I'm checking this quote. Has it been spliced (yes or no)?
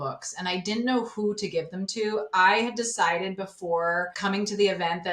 yes